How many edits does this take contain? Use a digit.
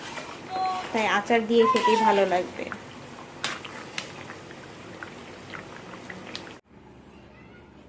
1